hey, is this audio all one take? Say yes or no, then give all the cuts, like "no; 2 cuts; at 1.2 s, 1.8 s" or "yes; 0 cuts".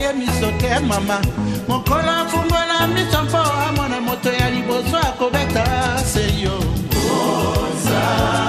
yes; 0 cuts